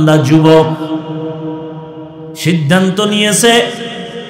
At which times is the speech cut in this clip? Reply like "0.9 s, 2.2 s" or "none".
none